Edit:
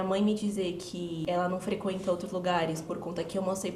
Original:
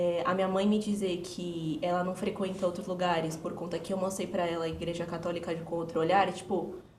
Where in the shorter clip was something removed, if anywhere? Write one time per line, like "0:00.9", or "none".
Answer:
0:01.2